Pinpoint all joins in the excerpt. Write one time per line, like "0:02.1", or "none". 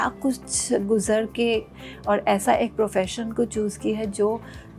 0:01.7